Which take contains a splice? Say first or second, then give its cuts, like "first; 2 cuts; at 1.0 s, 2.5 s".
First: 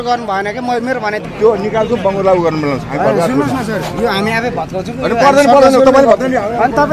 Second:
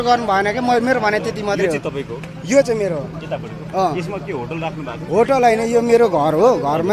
first; 1 cut; at 1.3 s